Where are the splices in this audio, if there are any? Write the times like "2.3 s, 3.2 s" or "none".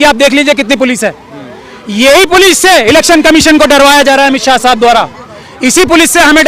none